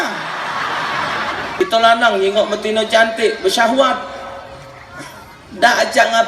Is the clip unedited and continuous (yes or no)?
no